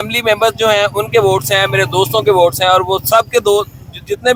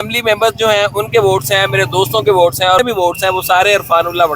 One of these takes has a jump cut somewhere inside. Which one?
second; 1 cut; at 2.8 s

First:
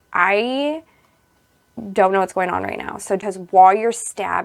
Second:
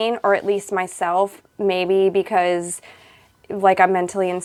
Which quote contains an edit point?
first; 1 cut; at 3.2 s

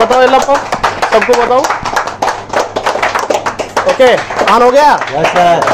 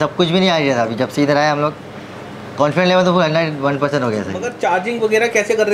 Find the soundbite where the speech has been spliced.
second; 1 cut; at 4.5 s

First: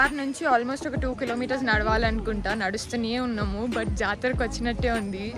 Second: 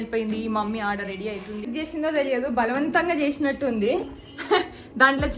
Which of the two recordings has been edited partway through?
second; 1 cut; at 1.7 s

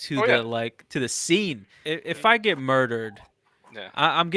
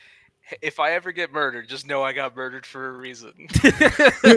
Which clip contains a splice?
first; 1 cut; at 1.7 s

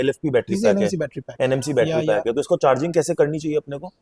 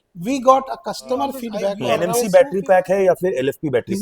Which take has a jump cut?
second; 1 cut; at 1.8 s

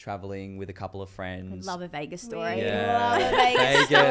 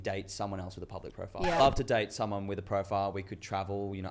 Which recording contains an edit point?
second; 1 cut; at 1.6 s

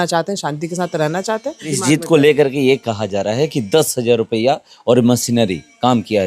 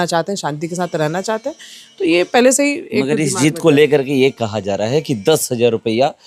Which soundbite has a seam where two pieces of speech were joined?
first; 1 cut; at 1.7 s

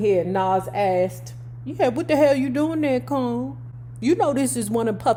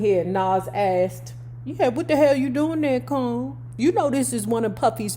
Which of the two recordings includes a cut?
second; 1 cut; at 3.6 s

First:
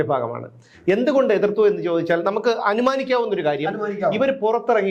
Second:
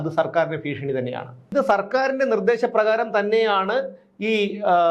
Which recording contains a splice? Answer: second; 1 cut; at 1.5 s

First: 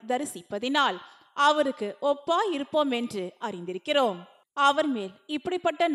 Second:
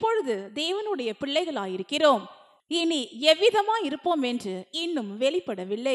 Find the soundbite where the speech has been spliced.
first; 2 cuts; at 1.2 s, 4.3 s

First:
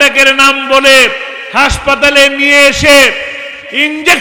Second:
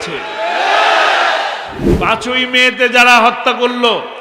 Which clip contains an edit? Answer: second; 1 cut; at 1.8 s

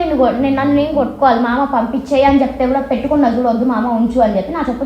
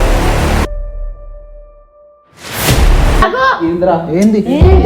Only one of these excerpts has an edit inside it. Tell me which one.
second; 1 cut; at 3.2 s

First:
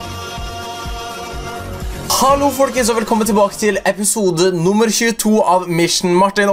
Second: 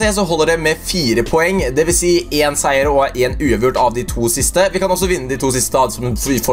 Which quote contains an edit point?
second; 1 cut; at 3.8 s

